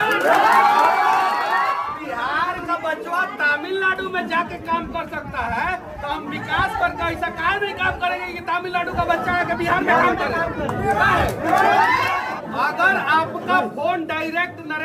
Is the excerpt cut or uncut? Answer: cut